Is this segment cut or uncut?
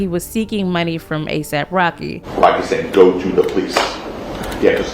cut